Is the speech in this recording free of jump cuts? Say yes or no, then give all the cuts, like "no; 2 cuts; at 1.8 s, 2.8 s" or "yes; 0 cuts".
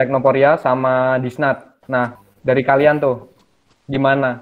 yes; 0 cuts